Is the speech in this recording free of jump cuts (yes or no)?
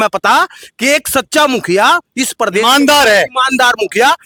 yes